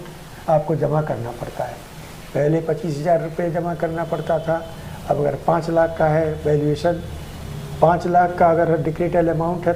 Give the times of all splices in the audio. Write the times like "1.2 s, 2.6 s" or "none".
none